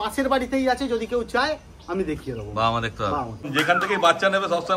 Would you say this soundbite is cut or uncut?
cut